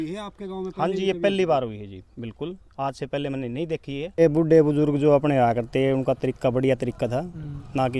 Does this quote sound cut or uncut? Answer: cut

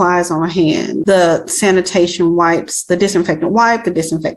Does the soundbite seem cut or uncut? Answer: cut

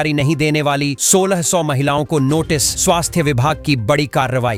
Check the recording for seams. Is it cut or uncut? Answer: uncut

